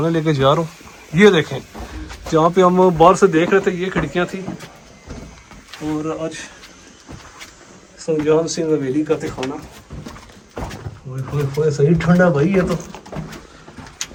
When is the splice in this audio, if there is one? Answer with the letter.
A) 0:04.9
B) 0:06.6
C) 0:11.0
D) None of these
D